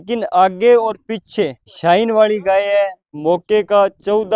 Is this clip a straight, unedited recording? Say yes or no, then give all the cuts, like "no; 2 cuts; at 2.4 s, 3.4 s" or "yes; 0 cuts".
no; 2 cuts; at 1.7 s, 3.1 s